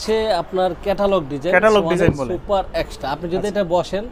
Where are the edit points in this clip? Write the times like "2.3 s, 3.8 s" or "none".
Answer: none